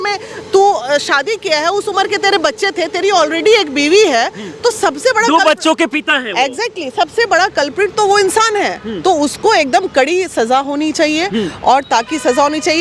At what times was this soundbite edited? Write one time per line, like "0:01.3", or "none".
none